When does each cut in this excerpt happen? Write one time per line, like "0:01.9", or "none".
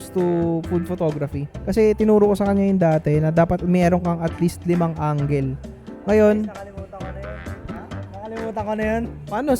none